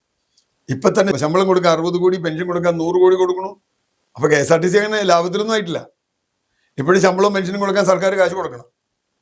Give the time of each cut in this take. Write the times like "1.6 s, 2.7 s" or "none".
1.1 s